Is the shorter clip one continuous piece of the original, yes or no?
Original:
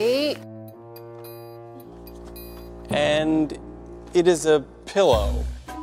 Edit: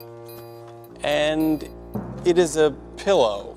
no